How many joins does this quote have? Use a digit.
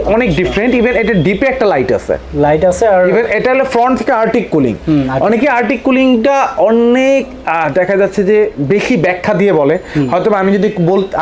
0